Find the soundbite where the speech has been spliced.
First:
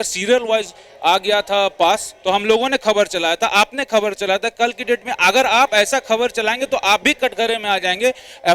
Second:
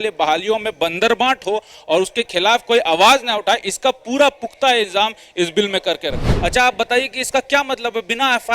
second; 1 cut; at 6.3 s

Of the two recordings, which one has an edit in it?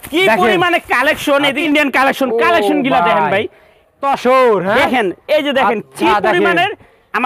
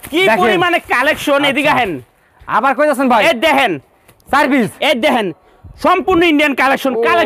first; 2 cuts; at 1.6 s, 4.0 s

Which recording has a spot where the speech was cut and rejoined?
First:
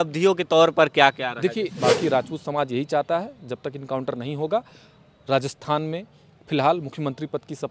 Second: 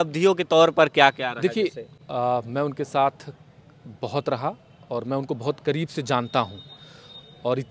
first; 1 cut; at 1.7 s

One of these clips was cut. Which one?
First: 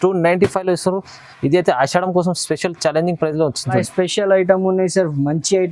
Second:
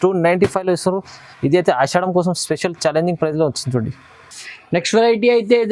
first; 1 cut; at 3.8 s

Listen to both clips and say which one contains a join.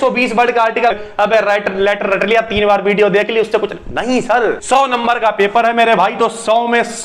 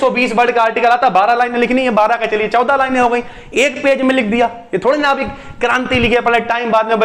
first; 2 cuts; at 0.9 s, 4.6 s

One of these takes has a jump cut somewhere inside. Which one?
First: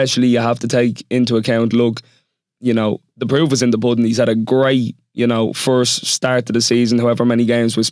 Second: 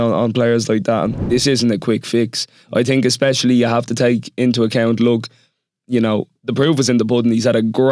second; 1 cut; at 1.2 s

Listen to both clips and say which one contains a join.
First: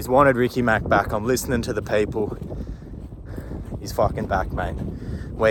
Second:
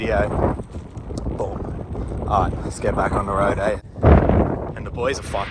second; 1 cut; at 3.8 s

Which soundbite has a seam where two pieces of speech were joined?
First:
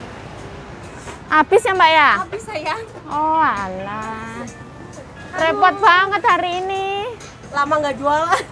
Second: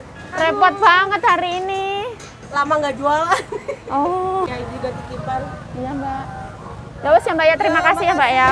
second; 1 cut; at 4.5 s

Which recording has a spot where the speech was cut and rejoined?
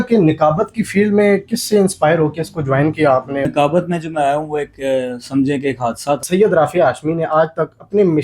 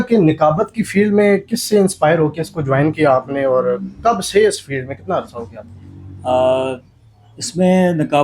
first; 2 cuts; at 3.4 s, 6.2 s

